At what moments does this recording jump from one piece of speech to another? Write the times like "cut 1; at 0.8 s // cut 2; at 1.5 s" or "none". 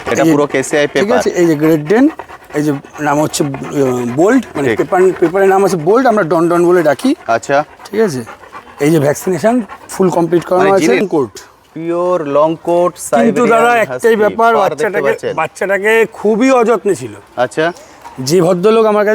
cut 1; at 11.0 s